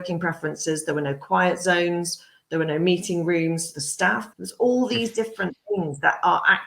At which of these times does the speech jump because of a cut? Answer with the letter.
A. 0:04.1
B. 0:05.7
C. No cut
A